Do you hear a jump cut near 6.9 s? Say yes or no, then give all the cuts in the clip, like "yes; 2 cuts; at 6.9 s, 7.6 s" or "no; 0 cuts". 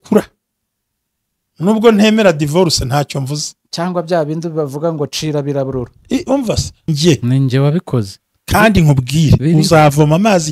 yes; 1 cut; at 6.9 s